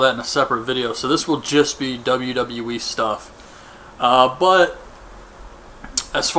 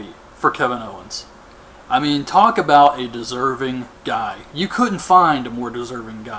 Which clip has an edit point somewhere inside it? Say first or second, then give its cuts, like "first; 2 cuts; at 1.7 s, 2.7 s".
first; 1 cut; at 1.4 s